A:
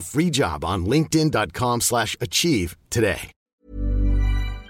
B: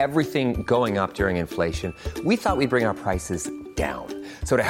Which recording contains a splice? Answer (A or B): A